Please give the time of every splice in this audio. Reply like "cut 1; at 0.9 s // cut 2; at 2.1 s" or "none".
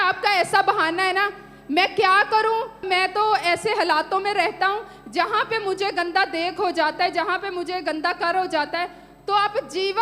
cut 1; at 2.8 s